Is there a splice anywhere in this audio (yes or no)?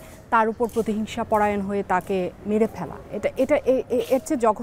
no